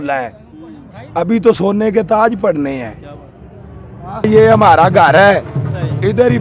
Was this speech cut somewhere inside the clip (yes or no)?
yes